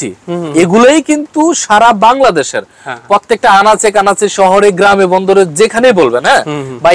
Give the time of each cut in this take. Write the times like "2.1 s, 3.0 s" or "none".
none